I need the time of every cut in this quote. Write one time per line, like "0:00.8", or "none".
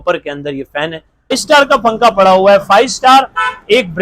0:01.4